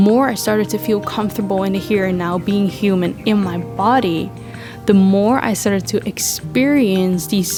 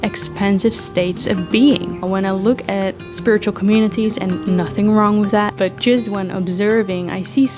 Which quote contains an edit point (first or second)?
second